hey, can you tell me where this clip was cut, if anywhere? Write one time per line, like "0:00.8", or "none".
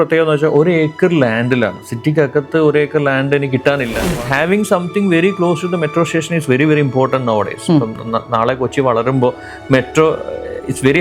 0:04.0